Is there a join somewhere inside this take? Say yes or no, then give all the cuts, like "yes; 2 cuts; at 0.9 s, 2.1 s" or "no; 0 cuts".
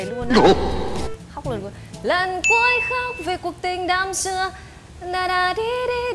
no; 0 cuts